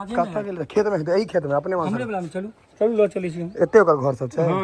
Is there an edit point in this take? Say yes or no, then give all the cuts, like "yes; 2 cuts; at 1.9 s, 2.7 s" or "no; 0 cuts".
no; 0 cuts